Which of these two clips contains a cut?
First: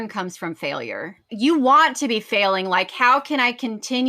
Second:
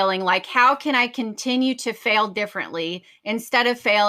first; 1 cut; at 1.3 s

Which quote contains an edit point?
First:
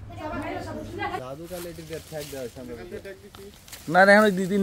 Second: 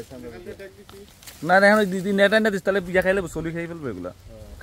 first; 1 cut; at 1.2 s

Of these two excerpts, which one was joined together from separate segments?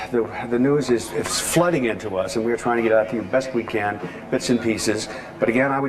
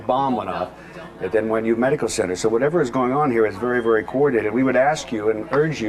first; 1 cut; at 3.1 s

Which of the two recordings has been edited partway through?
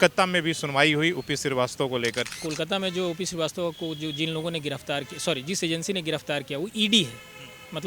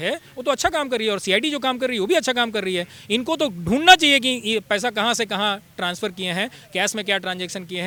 first; 1 cut; at 2.3 s

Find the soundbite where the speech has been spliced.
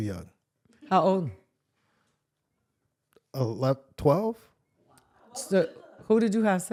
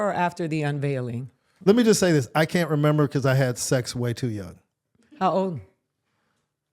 second; 1 cut; at 1.4 s

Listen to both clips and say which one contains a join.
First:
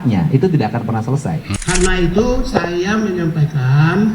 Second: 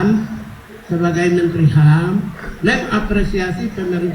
first; 1 cut; at 1.5 s

